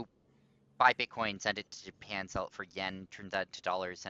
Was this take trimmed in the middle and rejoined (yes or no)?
no